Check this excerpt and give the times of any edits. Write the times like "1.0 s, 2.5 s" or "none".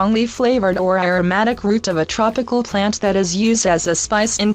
2.5 s